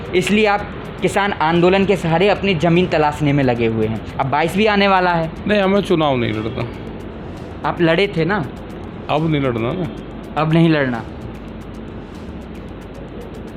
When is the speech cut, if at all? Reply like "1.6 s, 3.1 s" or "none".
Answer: none